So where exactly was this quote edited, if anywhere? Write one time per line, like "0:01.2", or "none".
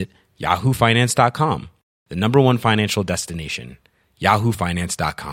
none